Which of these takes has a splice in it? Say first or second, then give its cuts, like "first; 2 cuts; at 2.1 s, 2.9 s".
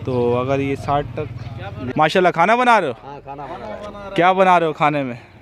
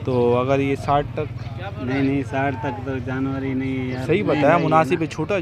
first; 1 cut; at 1.9 s